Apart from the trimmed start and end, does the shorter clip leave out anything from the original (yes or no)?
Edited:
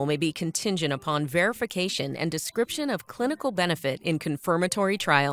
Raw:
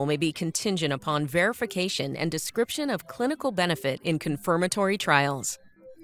no